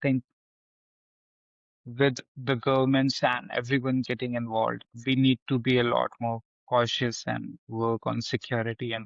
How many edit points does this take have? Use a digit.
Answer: 1